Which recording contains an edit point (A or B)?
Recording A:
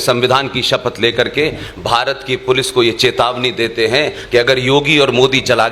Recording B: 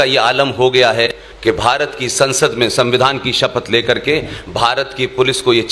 B